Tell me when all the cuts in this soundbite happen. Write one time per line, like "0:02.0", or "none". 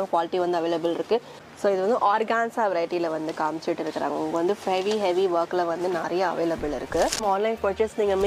0:01.4
0:07.2